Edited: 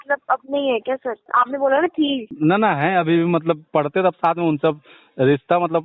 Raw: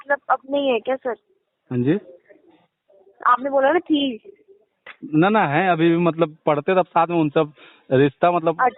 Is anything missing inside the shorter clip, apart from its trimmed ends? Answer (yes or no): yes